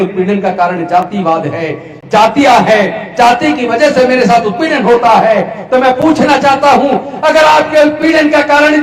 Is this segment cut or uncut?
uncut